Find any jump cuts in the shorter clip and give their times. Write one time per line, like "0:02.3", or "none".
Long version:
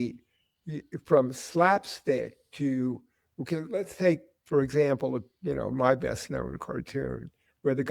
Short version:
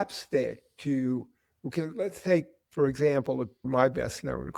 0:03.6